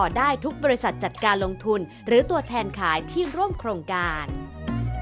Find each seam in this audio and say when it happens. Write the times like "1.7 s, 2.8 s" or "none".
4.1 s